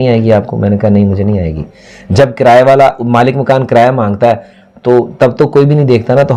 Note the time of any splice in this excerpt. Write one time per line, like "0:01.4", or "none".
none

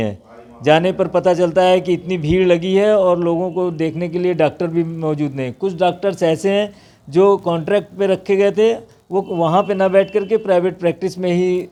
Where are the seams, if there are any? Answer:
none

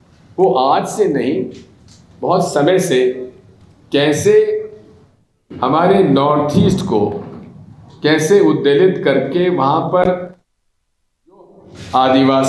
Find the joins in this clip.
none

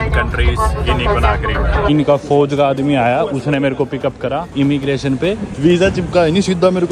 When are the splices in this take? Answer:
0:01.9
0:04.5
0:05.5

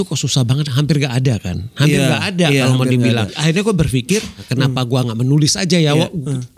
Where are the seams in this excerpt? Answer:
0:03.3
0:04.4

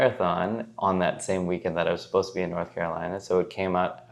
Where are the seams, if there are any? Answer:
none

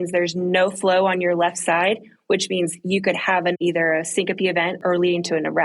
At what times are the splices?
0:03.6
0:04.8

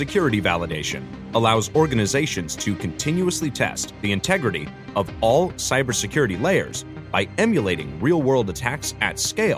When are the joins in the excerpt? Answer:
none

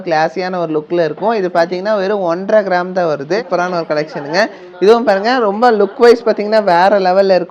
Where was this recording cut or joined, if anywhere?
0:03.4

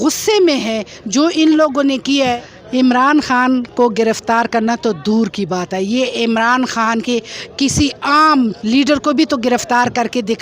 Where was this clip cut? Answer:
0:02.4

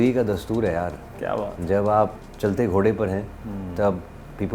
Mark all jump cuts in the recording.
0:02.2

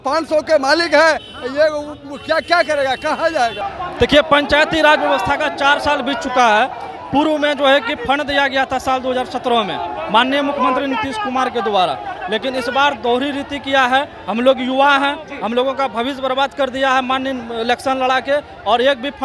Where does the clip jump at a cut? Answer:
0:03.6

